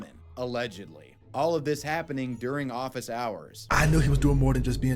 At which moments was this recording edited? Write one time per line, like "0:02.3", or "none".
0:03.7